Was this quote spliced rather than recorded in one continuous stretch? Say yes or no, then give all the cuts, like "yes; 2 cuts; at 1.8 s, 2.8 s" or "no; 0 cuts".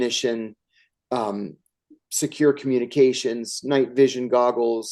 no; 0 cuts